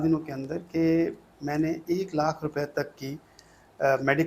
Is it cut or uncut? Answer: uncut